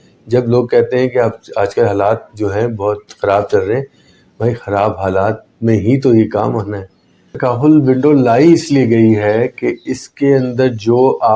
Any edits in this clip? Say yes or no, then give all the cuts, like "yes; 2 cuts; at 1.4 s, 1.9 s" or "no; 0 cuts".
yes; 1 cut; at 7.3 s